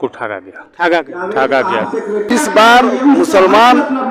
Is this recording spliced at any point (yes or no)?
yes